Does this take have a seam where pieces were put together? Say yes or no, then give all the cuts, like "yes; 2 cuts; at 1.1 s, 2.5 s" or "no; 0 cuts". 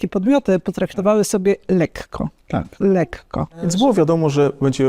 no; 0 cuts